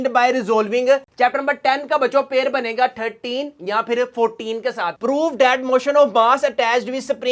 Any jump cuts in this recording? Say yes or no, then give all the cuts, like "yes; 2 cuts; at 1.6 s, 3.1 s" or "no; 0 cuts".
yes; 2 cuts; at 1.0 s, 5.0 s